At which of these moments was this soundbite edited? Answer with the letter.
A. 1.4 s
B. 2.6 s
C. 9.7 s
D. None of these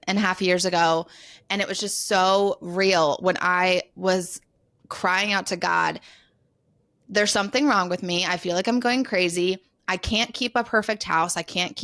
D